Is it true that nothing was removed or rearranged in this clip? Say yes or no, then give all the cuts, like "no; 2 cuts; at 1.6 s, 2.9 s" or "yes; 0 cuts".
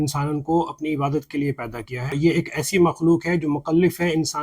no; 1 cut; at 1.9 s